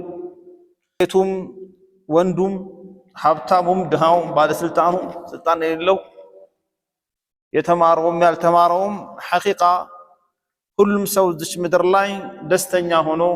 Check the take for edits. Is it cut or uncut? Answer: cut